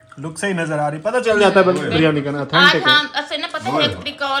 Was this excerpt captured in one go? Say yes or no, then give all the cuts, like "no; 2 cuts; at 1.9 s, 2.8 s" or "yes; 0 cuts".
yes; 0 cuts